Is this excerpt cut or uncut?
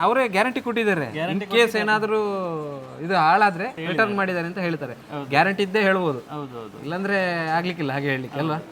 uncut